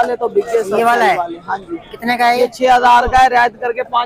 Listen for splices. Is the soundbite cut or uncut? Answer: uncut